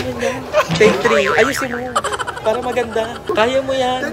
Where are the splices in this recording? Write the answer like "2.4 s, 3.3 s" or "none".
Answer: 3.2 s